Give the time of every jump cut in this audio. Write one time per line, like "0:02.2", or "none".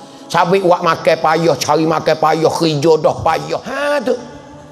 0:03.7